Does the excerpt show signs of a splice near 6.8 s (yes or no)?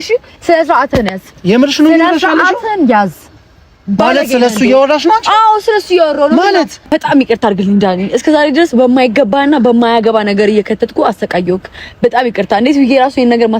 yes